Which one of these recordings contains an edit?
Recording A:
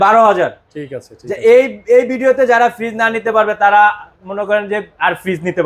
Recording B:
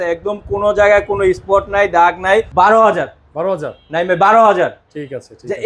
B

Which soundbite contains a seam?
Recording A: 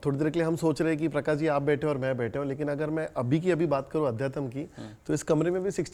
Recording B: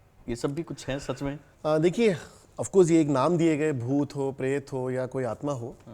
B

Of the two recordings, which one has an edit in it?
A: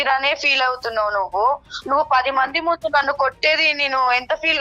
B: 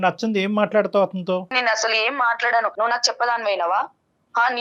B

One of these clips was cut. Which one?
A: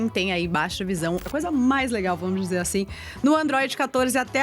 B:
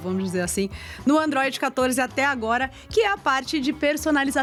A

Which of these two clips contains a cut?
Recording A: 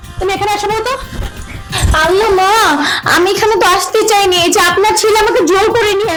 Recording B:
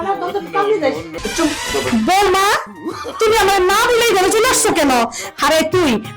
B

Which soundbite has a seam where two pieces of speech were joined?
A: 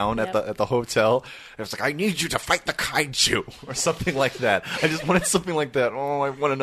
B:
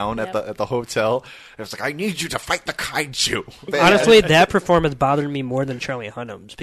B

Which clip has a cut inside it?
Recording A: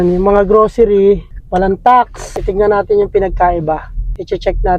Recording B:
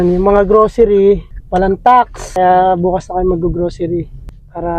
A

